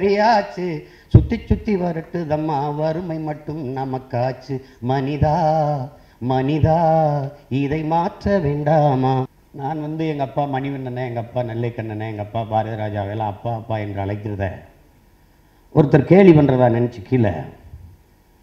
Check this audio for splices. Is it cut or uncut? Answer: cut